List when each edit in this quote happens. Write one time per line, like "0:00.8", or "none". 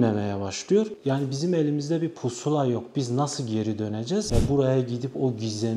0:00.9
0:04.3